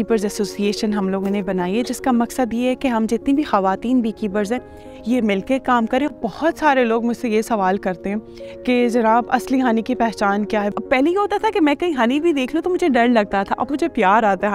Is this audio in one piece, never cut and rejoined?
no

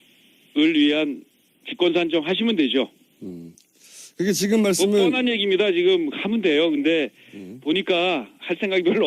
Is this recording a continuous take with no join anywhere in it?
no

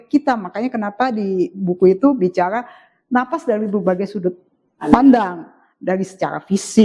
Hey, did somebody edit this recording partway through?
no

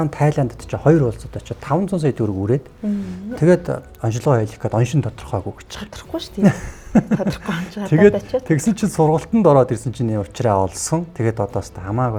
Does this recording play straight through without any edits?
yes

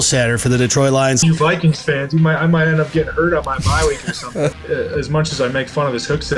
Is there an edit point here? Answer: yes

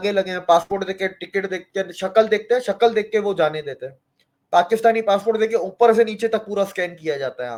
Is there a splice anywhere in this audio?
no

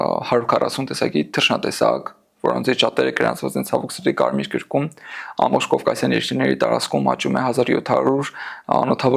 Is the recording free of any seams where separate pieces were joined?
yes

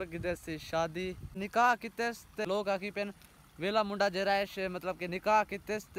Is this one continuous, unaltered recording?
no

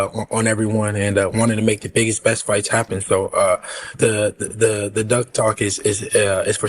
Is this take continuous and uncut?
no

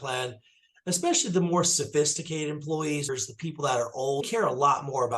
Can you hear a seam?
yes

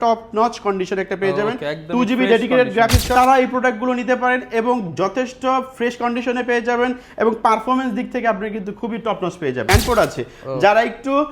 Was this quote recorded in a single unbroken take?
no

